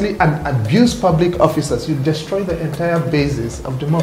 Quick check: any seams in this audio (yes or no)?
no